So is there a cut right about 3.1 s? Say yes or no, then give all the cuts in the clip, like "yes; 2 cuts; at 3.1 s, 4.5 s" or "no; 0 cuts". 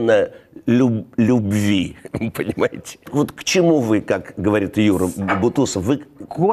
yes; 1 cut; at 3.1 s